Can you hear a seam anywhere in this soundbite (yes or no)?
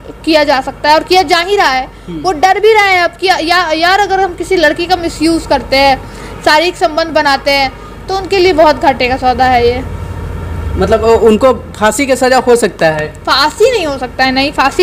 no